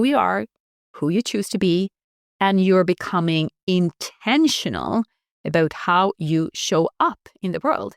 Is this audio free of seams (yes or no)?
yes